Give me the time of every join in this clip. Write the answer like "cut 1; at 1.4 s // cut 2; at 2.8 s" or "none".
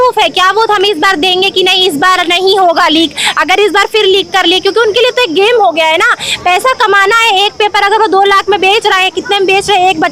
none